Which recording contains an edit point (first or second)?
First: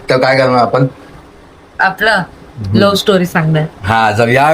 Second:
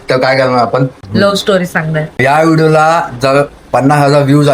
second